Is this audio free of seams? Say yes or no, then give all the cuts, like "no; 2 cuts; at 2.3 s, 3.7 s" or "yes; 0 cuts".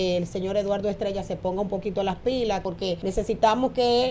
no; 1 cut; at 2.7 s